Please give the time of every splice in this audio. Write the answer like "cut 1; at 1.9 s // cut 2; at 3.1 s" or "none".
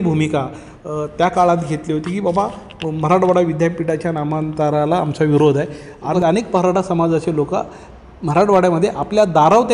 cut 1; at 6.1 s